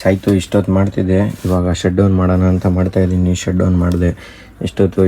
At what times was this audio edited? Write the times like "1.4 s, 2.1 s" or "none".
none